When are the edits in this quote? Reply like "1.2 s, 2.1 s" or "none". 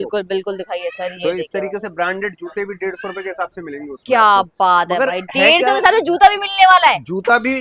none